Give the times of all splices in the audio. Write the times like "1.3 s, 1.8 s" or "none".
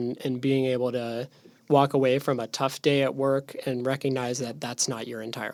none